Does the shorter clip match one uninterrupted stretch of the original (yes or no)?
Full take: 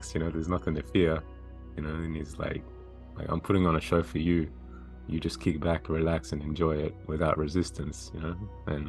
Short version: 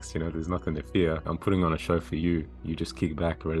no